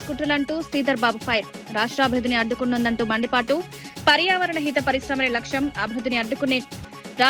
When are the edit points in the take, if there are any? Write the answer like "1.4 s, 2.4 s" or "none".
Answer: none

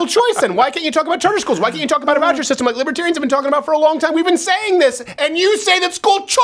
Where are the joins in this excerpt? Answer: none

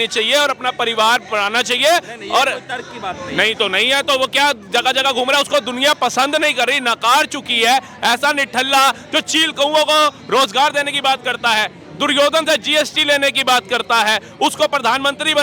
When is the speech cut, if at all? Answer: none

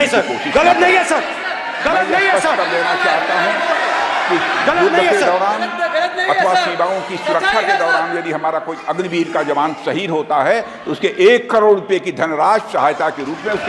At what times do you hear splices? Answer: none

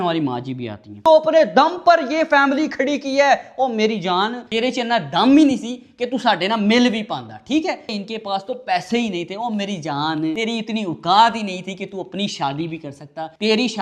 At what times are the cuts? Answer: 1.0 s, 7.8 s

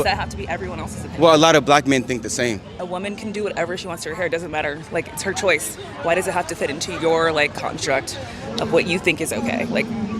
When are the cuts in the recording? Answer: 2.8 s

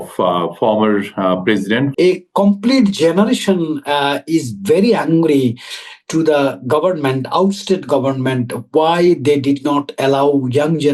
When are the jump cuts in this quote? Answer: 1.9 s

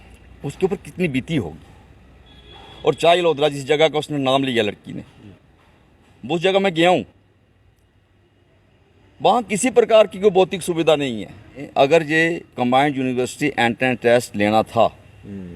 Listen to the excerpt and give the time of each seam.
11.6 s

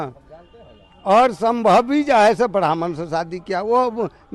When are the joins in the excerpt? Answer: none

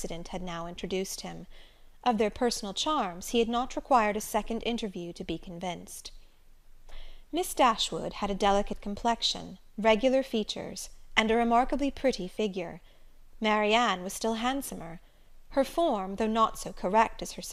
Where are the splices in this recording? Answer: none

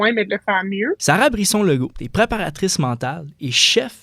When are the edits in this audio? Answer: 1.0 s, 2.0 s

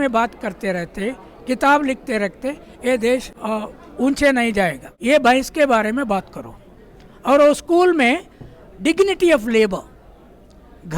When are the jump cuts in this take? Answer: 3.3 s, 4.9 s

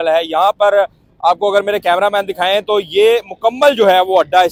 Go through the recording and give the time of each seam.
none

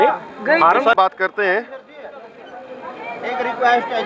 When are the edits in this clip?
0.9 s

